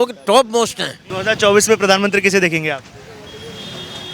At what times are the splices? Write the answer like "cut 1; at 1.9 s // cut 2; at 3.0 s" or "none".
cut 1; at 1.1 s